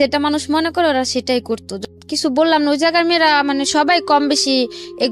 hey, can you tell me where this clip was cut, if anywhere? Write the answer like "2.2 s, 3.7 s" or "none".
1.7 s